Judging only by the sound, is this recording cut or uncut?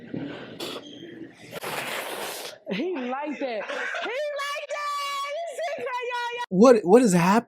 cut